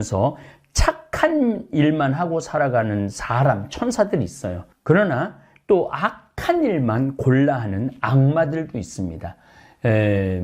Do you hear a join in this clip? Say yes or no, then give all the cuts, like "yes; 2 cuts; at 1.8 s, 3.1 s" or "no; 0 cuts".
no; 0 cuts